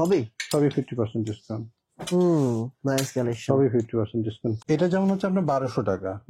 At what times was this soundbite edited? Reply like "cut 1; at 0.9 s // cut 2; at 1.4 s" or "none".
cut 1; at 4.6 s